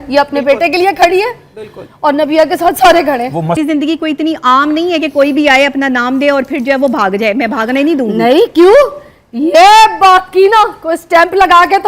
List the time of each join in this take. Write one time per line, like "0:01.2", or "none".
0:03.6